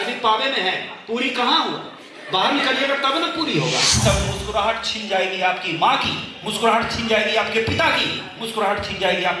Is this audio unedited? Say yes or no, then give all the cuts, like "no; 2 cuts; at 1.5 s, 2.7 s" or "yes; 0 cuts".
no; 1 cut; at 3.9 s